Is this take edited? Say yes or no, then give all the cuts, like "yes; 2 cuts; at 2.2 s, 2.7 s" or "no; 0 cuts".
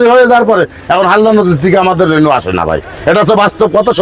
no; 0 cuts